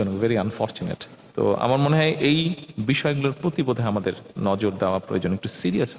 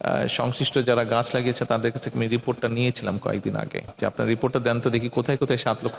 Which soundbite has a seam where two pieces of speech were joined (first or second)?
second